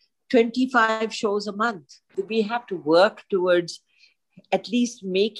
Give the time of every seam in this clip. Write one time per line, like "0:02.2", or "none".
0:02.1